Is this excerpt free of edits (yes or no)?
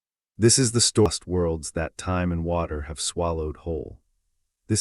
no